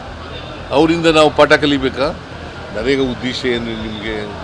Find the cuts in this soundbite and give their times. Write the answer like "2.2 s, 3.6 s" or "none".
2.3 s